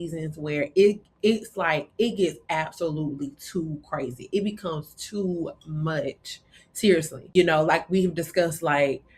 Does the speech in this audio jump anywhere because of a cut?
yes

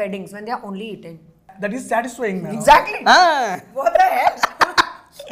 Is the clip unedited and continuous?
no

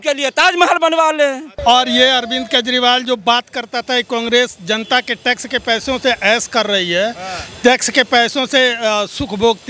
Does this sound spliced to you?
yes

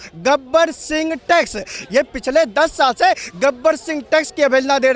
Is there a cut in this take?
no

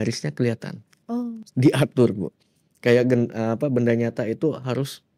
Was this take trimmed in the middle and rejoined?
no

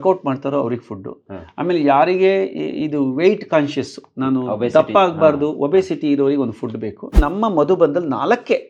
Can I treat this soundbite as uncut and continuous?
no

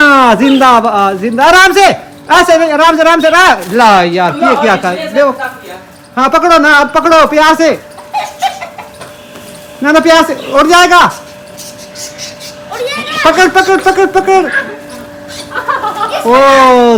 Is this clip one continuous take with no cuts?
yes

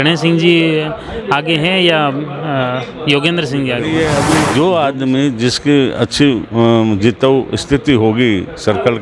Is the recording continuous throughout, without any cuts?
no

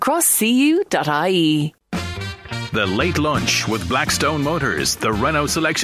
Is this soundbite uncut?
no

